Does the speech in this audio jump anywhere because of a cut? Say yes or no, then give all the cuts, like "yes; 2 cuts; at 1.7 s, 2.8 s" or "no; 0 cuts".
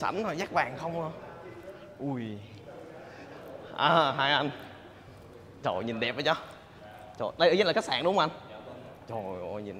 no; 0 cuts